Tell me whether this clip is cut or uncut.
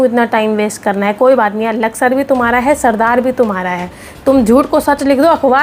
uncut